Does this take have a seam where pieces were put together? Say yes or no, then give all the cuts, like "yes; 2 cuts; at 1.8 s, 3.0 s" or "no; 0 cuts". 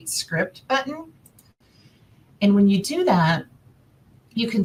no; 0 cuts